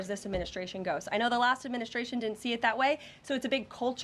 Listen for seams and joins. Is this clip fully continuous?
yes; 0 cuts

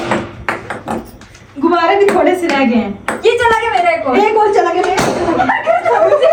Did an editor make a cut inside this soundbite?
no; 0 cuts

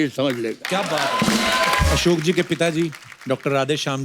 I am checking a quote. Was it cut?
yes; 1 cut; at 1.9 s

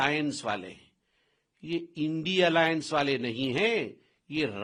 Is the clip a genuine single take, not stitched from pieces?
yes; 0 cuts

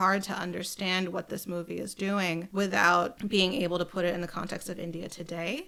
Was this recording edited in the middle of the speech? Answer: no; 0 cuts

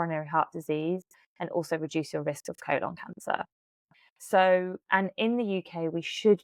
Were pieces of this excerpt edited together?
no; 0 cuts

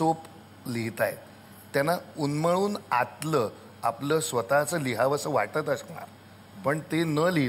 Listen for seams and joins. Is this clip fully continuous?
yes; 0 cuts

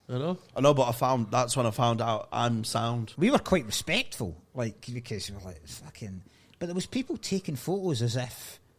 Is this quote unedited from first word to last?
no; 1 cut; at 3.1 s

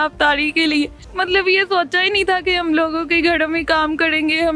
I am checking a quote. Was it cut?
yes; 1 cut; at 1.0 s

